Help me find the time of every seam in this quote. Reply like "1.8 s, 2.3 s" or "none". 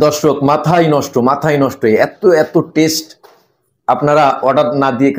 none